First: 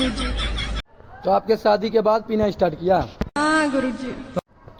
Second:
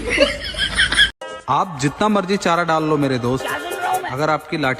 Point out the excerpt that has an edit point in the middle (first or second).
second